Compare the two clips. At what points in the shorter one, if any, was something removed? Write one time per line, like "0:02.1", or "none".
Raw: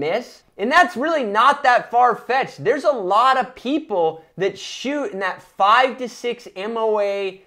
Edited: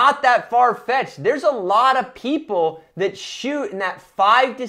none